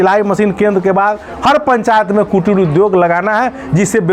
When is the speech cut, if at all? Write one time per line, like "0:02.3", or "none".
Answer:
none